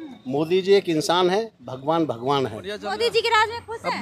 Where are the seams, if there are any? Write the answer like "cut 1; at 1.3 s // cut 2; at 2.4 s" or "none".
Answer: cut 1; at 2.9 s